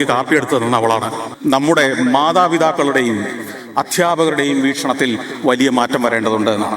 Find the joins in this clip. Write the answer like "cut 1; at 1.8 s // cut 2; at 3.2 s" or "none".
cut 1; at 1.3 s